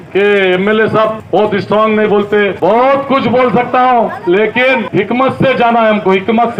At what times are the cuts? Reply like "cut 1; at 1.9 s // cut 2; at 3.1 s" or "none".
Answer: none